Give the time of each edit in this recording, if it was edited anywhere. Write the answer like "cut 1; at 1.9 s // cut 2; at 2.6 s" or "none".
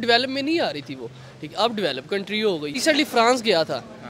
cut 1; at 2.8 s